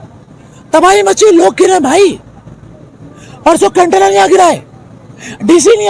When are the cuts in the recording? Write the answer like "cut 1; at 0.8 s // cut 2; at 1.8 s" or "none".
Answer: none